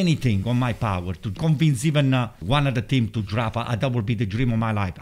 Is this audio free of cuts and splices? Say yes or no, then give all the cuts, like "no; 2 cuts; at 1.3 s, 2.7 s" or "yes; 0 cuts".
no; 2 cuts; at 1.4 s, 2.4 s